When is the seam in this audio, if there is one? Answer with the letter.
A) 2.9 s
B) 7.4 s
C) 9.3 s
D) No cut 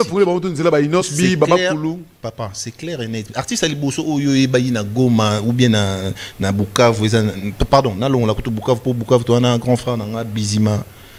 D